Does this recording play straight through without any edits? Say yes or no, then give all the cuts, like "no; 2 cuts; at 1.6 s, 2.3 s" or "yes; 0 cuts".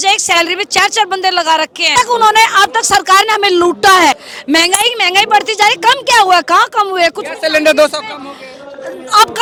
yes; 0 cuts